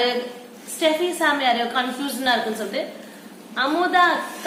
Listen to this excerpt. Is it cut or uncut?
uncut